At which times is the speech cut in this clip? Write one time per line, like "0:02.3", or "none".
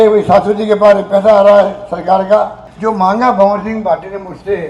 0:02.6